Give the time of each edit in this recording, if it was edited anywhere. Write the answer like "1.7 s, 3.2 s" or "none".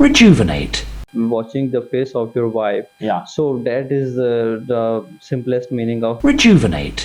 1.0 s